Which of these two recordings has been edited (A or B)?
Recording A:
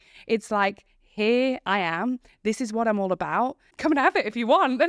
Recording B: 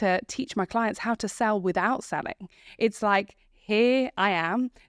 A